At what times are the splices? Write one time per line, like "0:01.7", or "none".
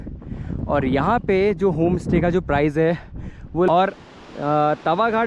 0:03.7